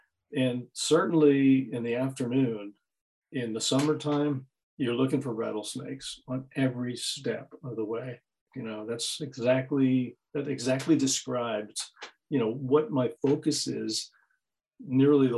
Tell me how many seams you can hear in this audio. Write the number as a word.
one